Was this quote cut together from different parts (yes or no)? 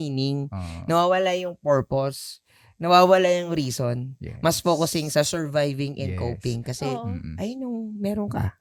no